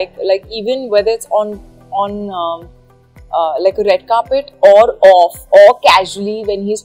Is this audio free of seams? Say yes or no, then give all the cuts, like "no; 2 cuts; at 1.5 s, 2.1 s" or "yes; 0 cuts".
yes; 0 cuts